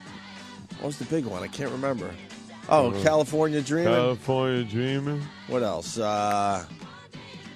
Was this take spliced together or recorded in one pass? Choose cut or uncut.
cut